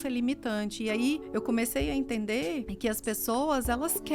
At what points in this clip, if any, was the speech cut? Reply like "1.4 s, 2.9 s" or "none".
1.2 s, 2.7 s